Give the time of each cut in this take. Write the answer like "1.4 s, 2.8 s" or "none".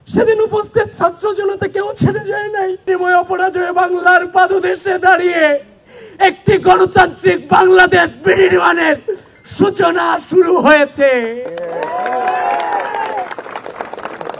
2.9 s